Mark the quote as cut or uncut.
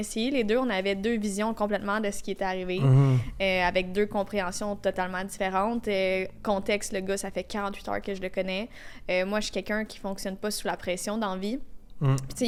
uncut